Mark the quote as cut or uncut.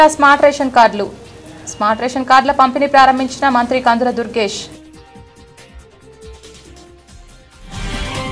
uncut